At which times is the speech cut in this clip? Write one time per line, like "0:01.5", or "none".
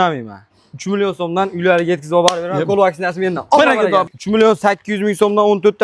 0:04.1